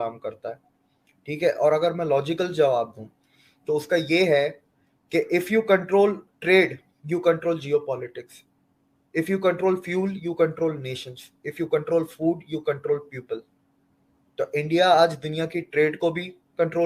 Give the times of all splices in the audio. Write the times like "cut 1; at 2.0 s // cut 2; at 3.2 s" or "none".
none